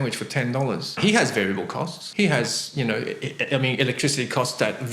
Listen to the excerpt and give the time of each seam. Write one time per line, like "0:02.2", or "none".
0:01.0
0:02.0